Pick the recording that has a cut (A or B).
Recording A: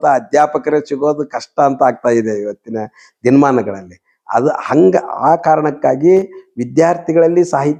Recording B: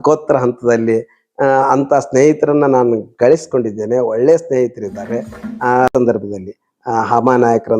B